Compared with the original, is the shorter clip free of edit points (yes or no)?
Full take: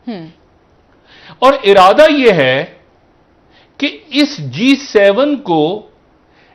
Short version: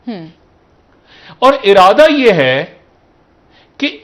yes